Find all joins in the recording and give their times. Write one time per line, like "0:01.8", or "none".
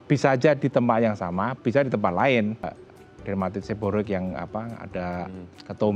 0:02.8